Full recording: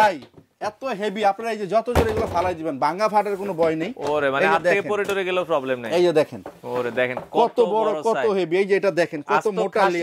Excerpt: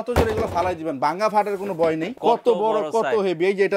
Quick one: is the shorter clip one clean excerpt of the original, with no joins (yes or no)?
no